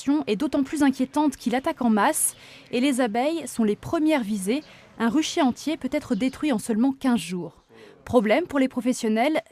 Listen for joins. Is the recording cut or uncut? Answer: uncut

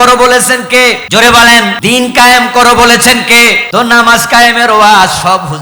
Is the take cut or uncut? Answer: cut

